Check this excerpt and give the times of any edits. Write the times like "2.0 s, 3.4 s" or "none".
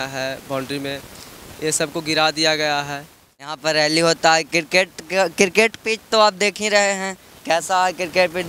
3.6 s